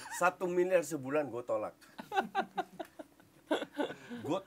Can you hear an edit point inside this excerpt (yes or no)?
no